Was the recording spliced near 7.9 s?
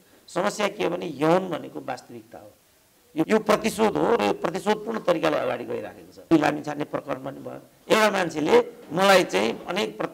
no; 2 cuts; at 3.3 s, 6.3 s

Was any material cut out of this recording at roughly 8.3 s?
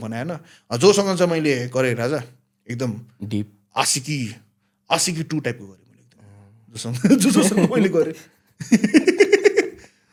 no; 0 cuts

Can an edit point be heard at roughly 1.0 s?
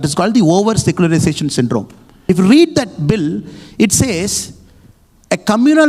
no; 1 cut; at 2.2 s

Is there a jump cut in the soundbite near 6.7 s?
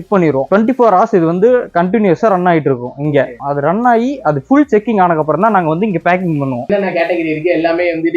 yes; 2 cuts; at 3.3 s, 6.7 s

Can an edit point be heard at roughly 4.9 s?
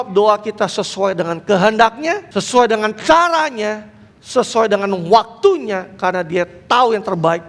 no; 1 cut; at 2.2 s

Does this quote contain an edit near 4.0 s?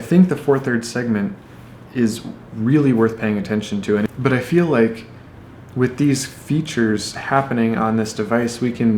yes; 1 cut; at 4.0 s

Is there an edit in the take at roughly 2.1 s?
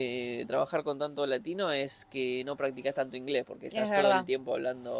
no; 0 cuts

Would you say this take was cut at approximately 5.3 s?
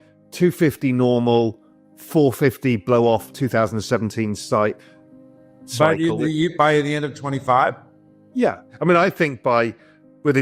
no; 1 cut; at 8.7 s

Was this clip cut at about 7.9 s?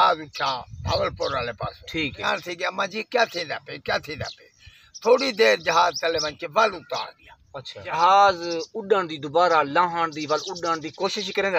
yes; 2 cuts; at 2.2 s, 7.9 s

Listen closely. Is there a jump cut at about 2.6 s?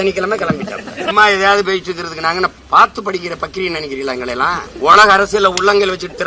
yes; 3 cuts; at 1.1 s, 2.6 s, 4.7 s

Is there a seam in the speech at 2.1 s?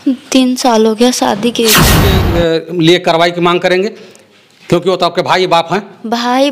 yes; 1 cut; at 2.1 s

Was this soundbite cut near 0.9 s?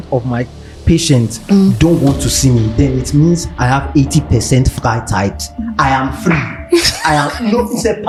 no; 0 cuts

